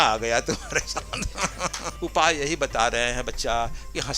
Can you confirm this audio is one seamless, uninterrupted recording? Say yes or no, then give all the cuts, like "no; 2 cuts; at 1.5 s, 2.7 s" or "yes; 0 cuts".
no; 1 cut; at 1.9 s